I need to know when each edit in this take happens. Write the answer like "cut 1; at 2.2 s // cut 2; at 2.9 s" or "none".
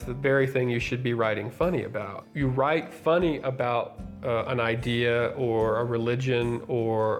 cut 1; at 2.2 s